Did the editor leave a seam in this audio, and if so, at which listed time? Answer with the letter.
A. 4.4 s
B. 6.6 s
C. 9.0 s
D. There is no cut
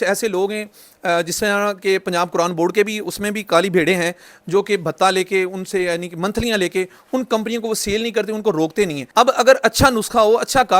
C